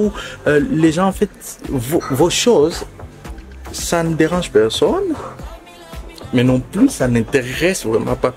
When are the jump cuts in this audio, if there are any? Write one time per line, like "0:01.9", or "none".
none